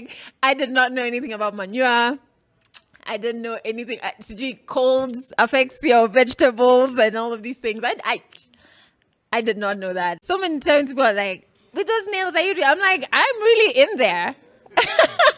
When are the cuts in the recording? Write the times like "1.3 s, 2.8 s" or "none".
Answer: 10.2 s